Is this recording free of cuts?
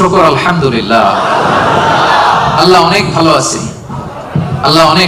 yes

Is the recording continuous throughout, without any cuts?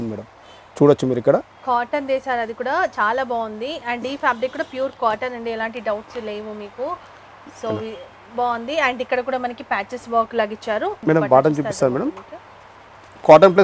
yes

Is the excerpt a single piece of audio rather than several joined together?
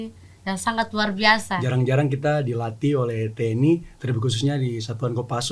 no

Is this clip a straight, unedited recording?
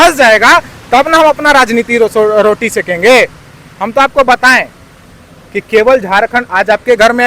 yes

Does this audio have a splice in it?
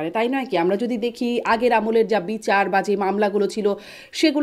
no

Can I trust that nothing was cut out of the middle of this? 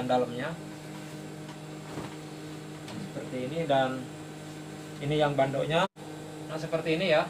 no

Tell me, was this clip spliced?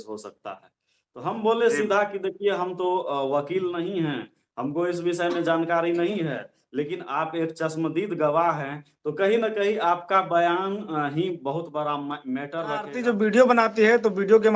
yes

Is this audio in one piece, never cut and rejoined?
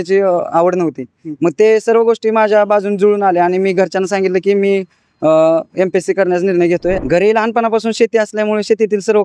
no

